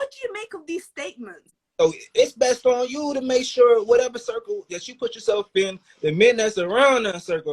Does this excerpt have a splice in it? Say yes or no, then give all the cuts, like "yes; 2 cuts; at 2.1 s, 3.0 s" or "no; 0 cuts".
yes; 1 cut; at 1.4 s